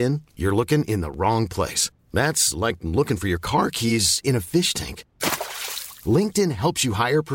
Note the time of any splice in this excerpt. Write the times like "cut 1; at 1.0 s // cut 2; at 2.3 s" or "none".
none

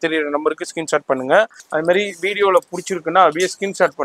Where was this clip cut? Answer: cut 1; at 1.6 s

